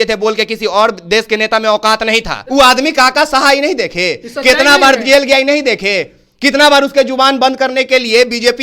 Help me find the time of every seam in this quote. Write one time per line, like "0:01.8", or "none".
0:02.4